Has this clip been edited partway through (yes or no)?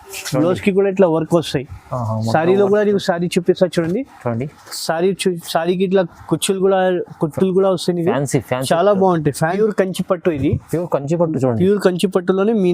yes